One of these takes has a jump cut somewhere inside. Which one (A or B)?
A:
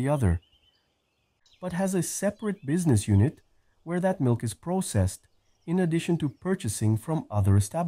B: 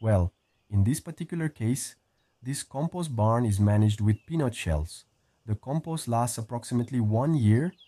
A